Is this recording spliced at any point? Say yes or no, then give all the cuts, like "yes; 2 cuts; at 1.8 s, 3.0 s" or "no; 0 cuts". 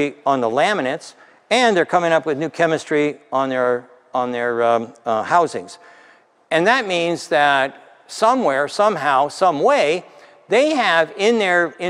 no; 0 cuts